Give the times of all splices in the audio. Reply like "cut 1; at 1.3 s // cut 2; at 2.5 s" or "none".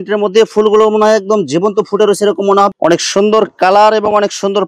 cut 1; at 2.7 s